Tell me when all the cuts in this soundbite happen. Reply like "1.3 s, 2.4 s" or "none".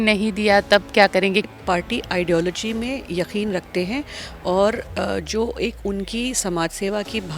1.5 s